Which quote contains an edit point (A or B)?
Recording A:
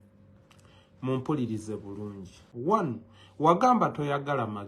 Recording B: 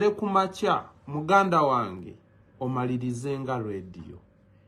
A